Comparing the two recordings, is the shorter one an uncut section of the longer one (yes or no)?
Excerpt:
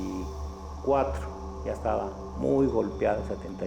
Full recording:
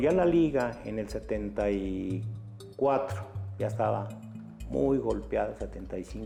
no